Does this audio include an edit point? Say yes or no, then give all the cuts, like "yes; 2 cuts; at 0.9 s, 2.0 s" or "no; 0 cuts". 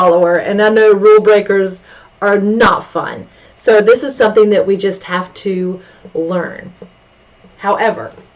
no; 0 cuts